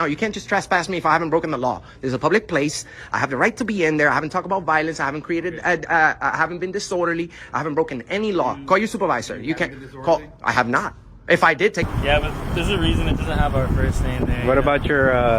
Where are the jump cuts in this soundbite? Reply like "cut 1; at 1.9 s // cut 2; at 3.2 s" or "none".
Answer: cut 1; at 11.9 s